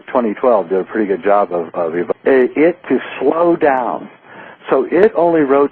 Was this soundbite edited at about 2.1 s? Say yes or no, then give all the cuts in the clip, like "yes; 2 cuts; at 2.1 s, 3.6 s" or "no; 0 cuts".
no; 0 cuts